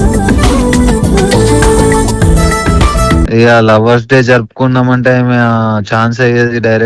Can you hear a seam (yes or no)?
yes